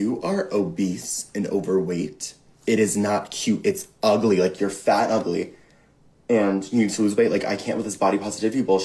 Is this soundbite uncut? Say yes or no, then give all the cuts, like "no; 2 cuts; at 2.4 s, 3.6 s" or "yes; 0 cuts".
yes; 0 cuts